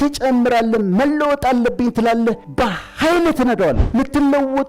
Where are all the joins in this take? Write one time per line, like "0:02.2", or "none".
0:02.5
0:03.8